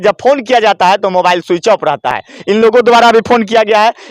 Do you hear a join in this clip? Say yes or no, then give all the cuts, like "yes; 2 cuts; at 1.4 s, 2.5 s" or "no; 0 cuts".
no; 0 cuts